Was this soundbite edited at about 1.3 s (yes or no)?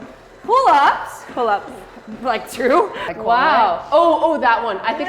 no